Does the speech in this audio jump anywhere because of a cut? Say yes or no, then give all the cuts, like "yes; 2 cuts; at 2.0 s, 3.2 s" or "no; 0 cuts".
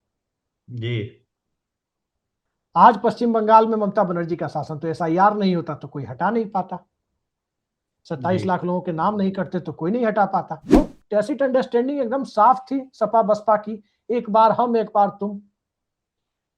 yes; 1 cut; at 10.8 s